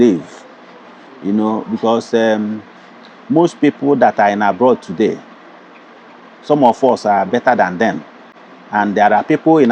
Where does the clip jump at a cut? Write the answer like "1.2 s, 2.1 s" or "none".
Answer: none